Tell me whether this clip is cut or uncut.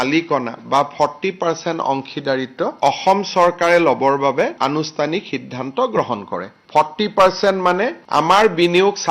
uncut